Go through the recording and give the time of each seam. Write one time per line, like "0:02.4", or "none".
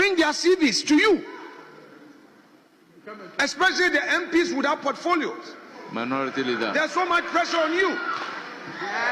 none